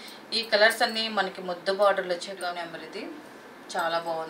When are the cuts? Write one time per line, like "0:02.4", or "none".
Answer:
0:02.3